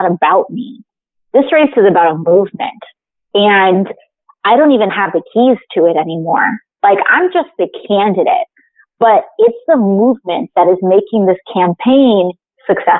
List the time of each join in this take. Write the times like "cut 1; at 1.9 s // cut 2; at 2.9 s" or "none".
none